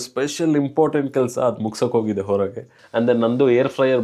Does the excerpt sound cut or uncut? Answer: cut